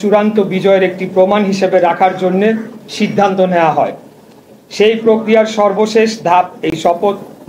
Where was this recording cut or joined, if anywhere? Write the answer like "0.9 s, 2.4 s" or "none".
none